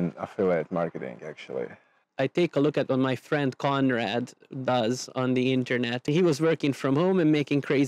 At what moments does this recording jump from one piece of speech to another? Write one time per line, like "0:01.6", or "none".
0:02.0
0:06.1